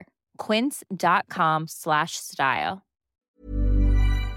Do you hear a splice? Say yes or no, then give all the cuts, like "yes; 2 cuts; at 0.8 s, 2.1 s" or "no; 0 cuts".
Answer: yes; 1 cut; at 3.1 s